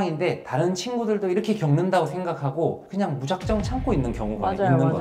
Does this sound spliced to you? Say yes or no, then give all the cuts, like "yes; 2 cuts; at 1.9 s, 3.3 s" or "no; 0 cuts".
no; 0 cuts